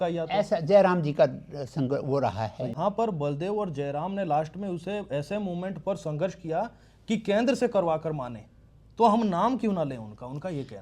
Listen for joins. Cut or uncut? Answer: cut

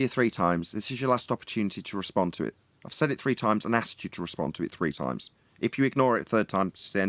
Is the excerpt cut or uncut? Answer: uncut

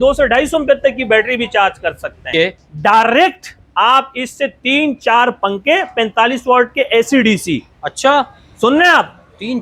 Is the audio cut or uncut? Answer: cut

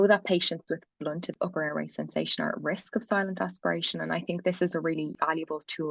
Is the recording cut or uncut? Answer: cut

